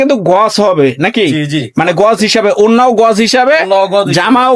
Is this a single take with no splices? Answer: yes; 0 cuts

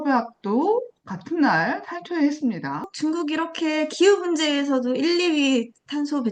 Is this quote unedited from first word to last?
no; 1 cut; at 2.9 s

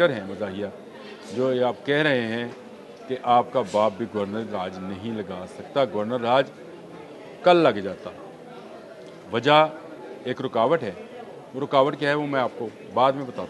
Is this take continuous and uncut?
yes; 0 cuts

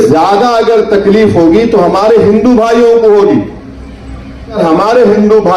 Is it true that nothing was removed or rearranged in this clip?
no; 1 cut; at 4.6 s

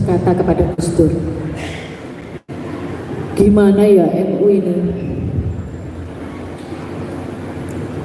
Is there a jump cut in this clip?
no; 0 cuts

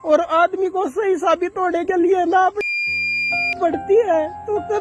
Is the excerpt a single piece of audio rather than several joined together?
yes; 0 cuts

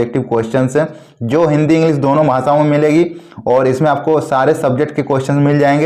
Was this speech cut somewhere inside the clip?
no; 0 cuts

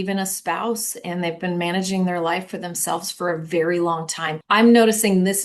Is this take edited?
yes; 1 cut; at 4.3 s

